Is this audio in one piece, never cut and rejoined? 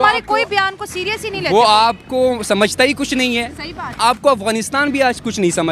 no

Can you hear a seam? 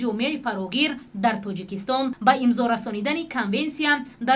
yes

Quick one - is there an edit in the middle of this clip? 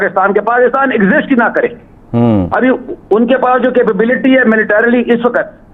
no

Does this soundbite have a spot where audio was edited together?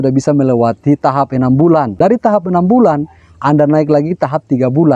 yes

